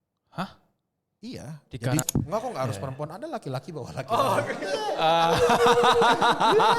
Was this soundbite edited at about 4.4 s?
no; 1 cut; at 2.0 s

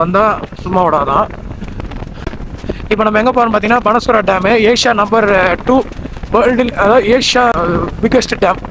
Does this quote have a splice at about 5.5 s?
no; 2 cuts; at 2.1 s, 7.5 s

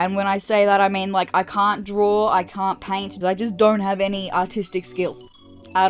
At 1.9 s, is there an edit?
no; 1 cut; at 3.1 s

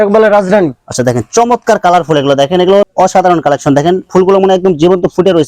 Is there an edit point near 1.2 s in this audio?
no; 1 cut; at 2.9 s

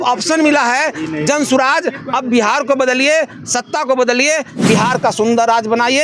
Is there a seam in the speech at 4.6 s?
yes; 1 cut; at 4.6 s

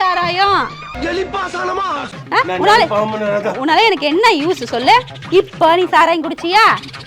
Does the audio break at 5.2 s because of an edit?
no; 1 cut; at 2.0 s

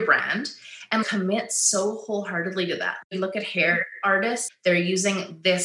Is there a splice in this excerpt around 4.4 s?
yes; 2 cuts; at 3.1 s, 4.4 s

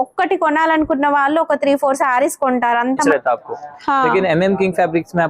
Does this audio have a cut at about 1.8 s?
no; 1 cut; at 3.1 s

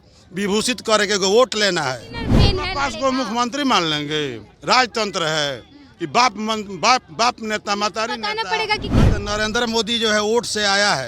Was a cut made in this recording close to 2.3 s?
yes; 2 cuts; at 2.3 s, 9.1 s

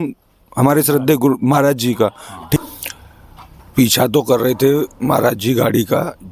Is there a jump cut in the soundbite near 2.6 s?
yes; 1 cut; at 2.6 s

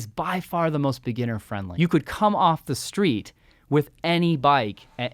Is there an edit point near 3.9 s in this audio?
no; 1 cut; at 1.7 s

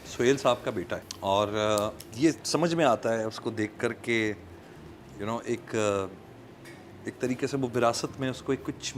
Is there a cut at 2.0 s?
yes; 2 cuts; at 1.0 s, 2.0 s

